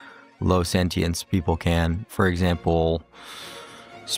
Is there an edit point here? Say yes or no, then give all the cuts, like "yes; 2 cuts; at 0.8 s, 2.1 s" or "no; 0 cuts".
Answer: yes; 1 cut; at 2.4 s